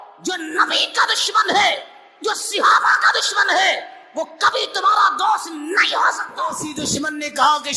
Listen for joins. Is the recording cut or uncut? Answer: cut